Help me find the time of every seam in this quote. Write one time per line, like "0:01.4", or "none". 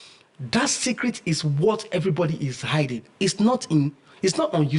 none

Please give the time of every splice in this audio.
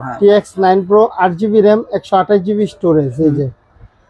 none

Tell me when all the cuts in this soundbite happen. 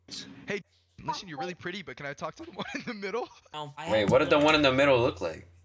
0:03.5

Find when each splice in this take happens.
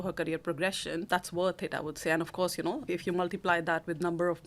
0:01.0
0:02.9

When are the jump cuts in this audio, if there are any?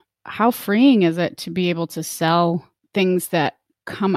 0:02.8

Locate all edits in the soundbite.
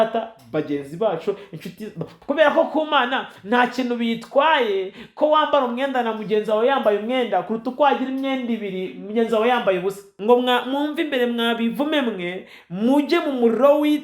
0:02.1
0:10.1

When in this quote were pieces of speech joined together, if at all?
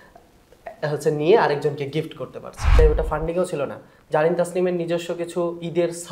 0:02.7

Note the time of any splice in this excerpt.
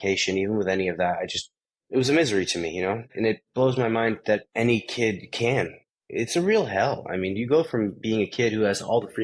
0:03.1
0:04.5
0:05.8

